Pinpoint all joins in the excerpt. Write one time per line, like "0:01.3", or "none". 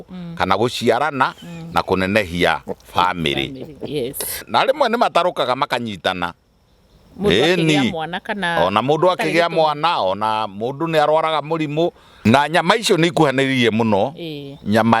0:04.4
0:12.2